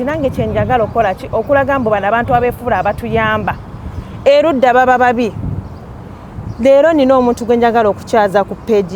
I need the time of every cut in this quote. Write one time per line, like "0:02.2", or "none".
none